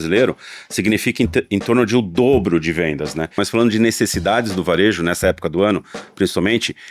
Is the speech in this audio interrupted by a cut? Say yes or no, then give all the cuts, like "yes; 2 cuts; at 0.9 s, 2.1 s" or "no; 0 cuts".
yes; 1 cut; at 3.4 s